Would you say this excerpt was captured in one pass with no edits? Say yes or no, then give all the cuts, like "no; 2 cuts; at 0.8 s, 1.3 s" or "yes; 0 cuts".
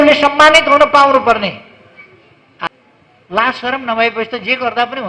no; 1 cut; at 2.7 s